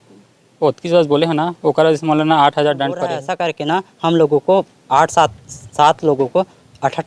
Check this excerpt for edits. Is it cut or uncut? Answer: cut